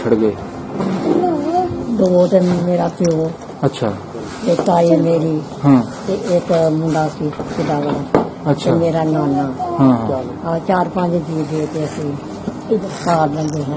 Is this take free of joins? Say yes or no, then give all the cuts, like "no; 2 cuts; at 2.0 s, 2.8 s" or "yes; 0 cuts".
yes; 0 cuts